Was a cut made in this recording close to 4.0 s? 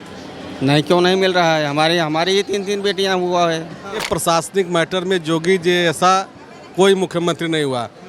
yes; 1 cut; at 4.0 s

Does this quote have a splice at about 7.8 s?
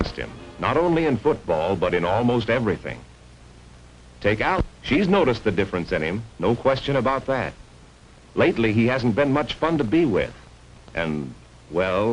no; 1 cut; at 10.1 s

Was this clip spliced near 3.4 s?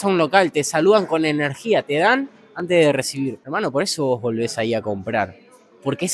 yes; 1 cut; at 3.4 s

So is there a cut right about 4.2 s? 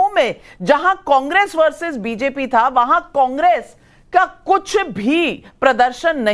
no; 0 cuts

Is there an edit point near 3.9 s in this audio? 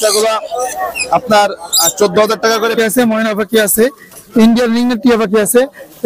no; 1 cut; at 2.7 s

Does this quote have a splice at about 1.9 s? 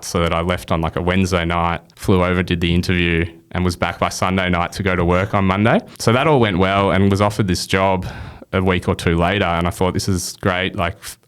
yes; 2 cuts; at 1.9 s, 5.9 s

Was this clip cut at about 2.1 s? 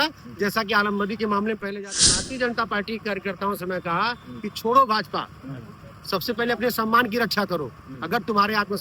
yes; 1 cut; at 2.1 s

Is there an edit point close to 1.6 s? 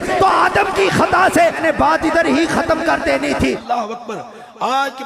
yes; 2 cuts; at 1.6 s, 3.6 s

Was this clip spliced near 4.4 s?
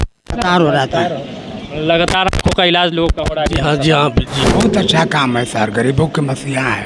yes; 1 cut; at 4.4 s

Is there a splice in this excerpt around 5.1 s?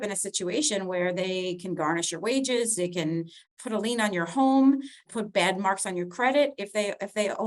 yes; 1 cut; at 5.1 s

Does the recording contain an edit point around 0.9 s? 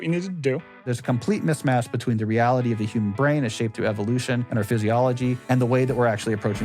yes; 3 cuts; at 0.9 s, 4.5 s, 5.4 s

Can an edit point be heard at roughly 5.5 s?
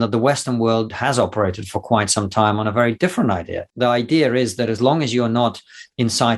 no; 2 cuts; at 0.9 s, 3.6 s

